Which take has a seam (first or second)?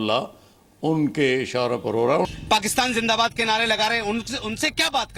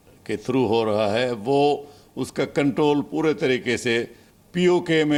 first